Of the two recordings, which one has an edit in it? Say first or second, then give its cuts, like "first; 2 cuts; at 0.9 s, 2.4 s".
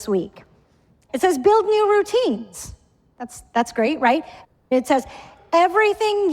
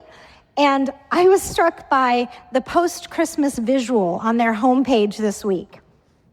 first; 1 cut; at 4.6 s